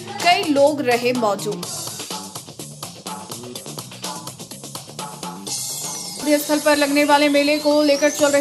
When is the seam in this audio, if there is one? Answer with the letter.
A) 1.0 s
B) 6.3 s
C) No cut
B